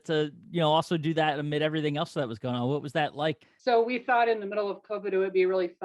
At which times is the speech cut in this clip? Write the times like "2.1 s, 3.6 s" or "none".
3.4 s